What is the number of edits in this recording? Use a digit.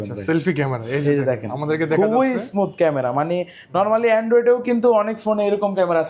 0